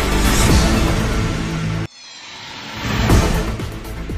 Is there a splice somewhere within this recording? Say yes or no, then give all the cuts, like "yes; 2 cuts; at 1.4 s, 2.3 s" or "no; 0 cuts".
no; 0 cuts